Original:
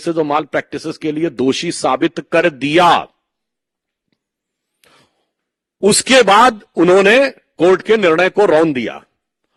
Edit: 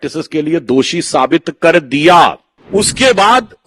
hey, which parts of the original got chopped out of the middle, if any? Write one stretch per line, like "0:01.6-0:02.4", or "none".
0:03.2-0:05.6